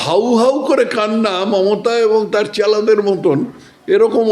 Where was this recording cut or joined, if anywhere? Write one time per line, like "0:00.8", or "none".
none